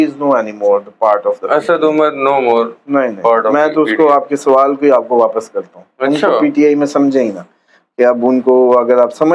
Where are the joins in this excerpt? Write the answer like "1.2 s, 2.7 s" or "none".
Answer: none